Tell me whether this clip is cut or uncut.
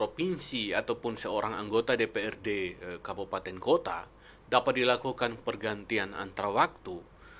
uncut